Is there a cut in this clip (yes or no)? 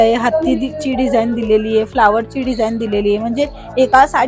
no